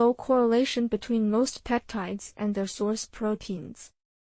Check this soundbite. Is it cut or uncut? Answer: cut